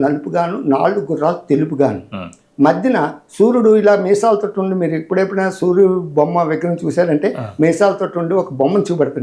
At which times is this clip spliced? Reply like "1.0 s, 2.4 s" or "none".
none